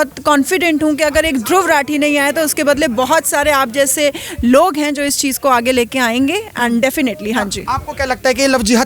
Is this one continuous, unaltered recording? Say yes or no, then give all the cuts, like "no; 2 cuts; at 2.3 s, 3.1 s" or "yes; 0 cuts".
yes; 0 cuts